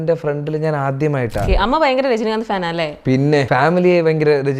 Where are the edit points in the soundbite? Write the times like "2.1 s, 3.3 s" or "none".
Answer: 1.5 s, 3.5 s